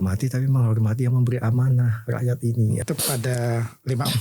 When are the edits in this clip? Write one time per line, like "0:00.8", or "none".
0:02.8